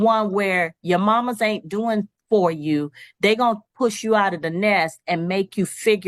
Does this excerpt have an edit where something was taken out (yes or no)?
no